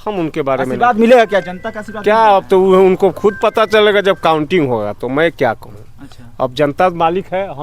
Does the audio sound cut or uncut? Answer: uncut